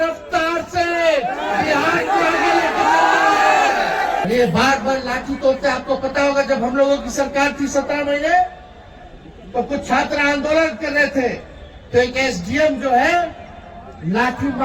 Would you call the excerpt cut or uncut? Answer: cut